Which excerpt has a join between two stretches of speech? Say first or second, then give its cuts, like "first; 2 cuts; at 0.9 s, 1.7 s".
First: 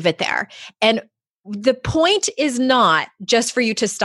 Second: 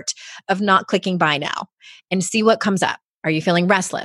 second; 1 cut; at 3.1 s